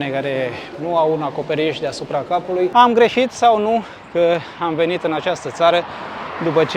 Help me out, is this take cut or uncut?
cut